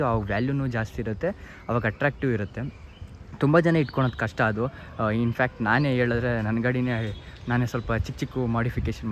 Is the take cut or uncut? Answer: uncut